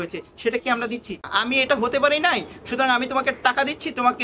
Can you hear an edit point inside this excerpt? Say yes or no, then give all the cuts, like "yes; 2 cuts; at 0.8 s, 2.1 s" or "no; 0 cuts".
yes; 1 cut; at 1.2 s